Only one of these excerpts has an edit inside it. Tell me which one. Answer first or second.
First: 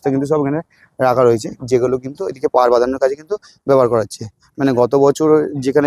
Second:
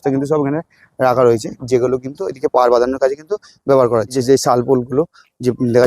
second